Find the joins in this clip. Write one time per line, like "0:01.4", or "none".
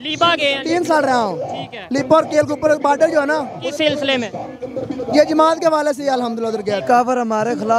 0:06.8